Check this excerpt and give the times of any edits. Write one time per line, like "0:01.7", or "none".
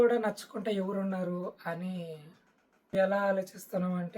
0:02.9